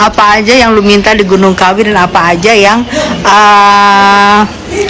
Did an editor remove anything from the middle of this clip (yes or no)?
no